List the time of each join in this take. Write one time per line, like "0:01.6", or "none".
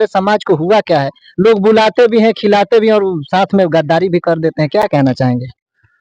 none